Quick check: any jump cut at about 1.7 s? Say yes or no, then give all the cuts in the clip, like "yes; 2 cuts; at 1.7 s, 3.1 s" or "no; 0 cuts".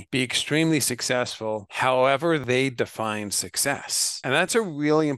yes; 3 cuts; at 1.7 s, 2.4 s, 4.5 s